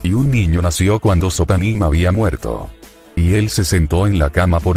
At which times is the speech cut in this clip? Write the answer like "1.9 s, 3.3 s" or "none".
none